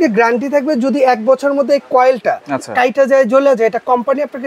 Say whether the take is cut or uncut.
uncut